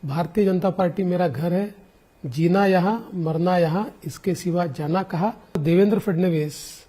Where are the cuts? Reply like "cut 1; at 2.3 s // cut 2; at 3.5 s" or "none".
cut 1; at 5.6 s

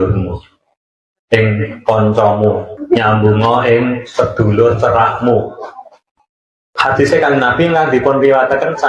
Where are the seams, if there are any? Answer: cut 1; at 6.0 s

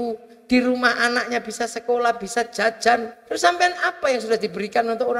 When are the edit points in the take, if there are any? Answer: cut 1; at 3.2 s

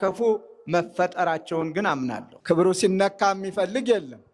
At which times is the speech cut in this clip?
cut 1; at 2.3 s

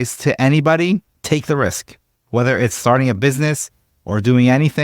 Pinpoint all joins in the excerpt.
cut 1; at 1.1 s

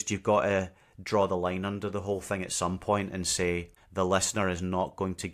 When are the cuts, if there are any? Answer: cut 1; at 3.8 s

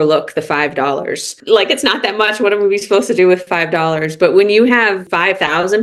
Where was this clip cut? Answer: none

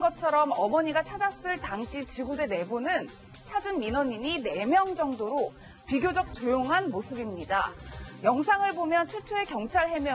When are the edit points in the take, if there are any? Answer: cut 1; at 1.8 s

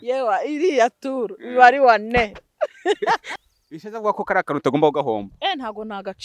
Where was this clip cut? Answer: cut 1; at 3.3 s

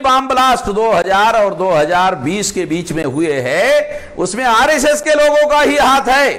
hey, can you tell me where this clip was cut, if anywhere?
none

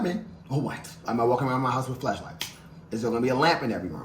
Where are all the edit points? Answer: cut 1; at 1.0 s

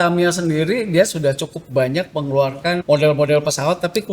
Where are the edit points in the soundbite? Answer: cut 1; at 2.8 s

